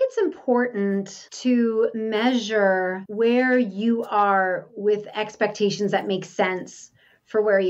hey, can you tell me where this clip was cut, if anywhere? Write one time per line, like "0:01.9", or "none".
0:01.2
0:02.0
0:03.0